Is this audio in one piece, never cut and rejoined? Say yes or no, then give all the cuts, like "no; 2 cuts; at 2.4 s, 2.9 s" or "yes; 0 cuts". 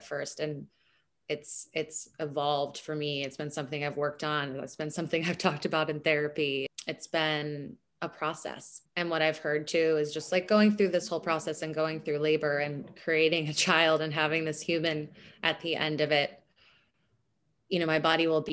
no; 2 cuts; at 6.7 s, 8.8 s